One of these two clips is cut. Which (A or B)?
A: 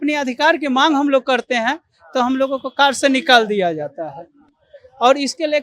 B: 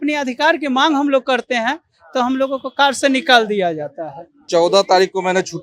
B